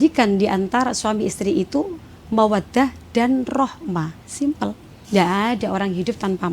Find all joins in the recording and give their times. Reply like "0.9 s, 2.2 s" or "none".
5.0 s